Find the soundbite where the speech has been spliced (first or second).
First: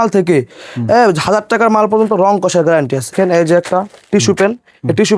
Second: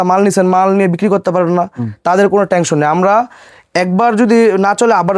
first